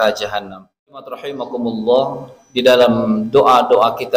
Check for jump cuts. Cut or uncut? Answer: cut